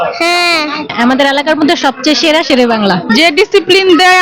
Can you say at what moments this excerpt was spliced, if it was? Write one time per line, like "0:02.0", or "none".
0:03.0